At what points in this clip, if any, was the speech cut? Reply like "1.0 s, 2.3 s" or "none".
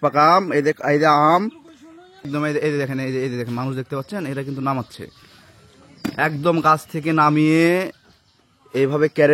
2.3 s